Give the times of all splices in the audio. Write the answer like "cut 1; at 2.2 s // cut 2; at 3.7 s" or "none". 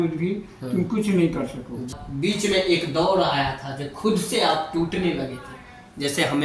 cut 1; at 2.0 s